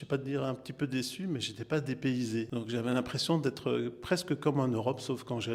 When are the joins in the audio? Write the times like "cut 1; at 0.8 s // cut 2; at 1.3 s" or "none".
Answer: cut 1; at 2.5 s